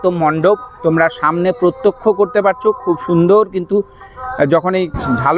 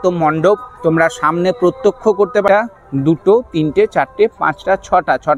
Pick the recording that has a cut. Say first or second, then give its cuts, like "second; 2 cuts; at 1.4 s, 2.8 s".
second; 1 cut; at 2.5 s